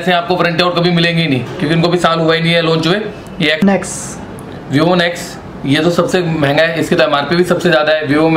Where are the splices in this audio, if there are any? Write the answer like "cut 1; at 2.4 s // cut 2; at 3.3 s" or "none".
cut 1; at 3.6 s